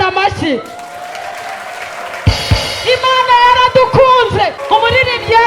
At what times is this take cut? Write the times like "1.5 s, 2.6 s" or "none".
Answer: 4.6 s

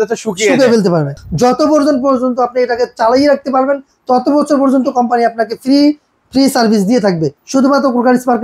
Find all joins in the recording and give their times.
1.2 s, 7.3 s

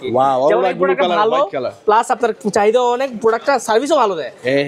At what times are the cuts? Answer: none

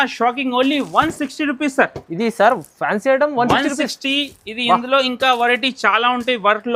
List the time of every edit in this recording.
none

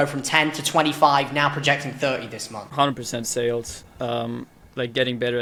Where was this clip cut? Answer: none

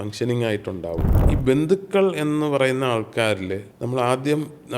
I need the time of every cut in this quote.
1.1 s, 3.7 s

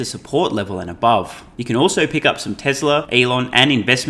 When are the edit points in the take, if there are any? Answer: 1.5 s, 3.1 s

